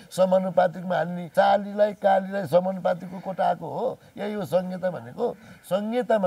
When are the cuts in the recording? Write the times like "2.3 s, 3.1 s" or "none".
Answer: 1.2 s